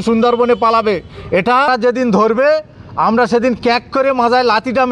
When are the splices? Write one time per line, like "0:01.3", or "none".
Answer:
0:01.7